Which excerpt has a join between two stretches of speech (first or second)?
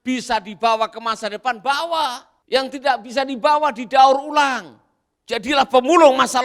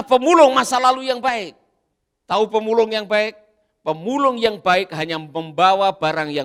first